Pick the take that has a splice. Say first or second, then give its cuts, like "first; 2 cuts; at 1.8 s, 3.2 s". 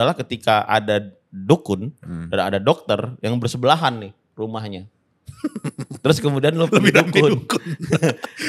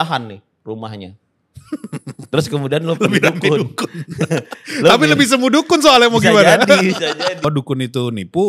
second; 1 cut; at 7.4 s